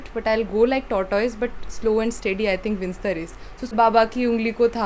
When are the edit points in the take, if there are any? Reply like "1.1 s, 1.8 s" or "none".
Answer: 3.7 s